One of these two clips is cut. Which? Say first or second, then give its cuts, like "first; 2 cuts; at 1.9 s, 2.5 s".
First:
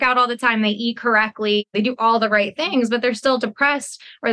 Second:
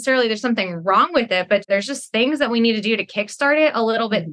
second; 1 cut; at 1.7 s